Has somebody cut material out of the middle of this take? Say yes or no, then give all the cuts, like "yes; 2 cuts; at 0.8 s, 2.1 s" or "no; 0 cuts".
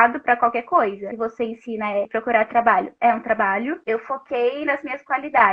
yes; 3 cuts; at 1.1 s, 2.1 s, 3.8 s